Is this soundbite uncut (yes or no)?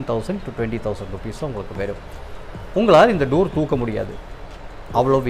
yes